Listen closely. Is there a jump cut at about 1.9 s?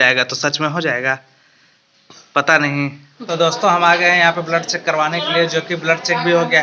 no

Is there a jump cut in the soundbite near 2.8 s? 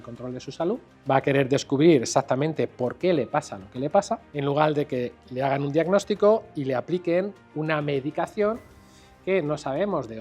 no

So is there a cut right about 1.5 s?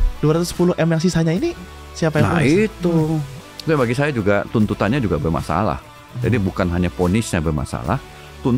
no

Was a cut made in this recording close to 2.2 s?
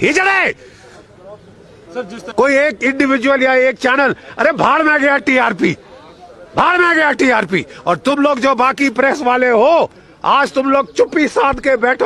yes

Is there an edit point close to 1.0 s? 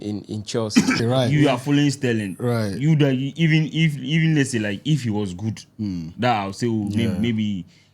yes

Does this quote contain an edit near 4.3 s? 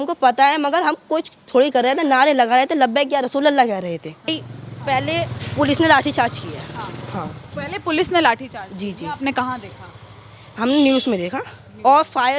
yes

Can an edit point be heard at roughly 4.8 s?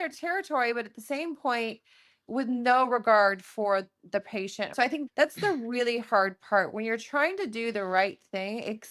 yes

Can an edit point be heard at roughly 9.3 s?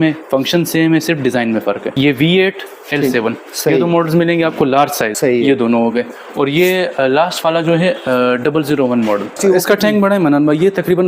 yes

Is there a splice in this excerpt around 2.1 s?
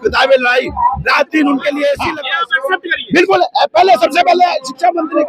yes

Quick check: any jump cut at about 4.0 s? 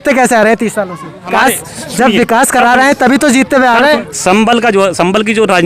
yes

